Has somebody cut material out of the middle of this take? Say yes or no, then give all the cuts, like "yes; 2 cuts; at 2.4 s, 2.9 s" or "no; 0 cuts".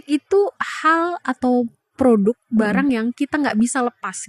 yes; 1 cut; at 1.8 s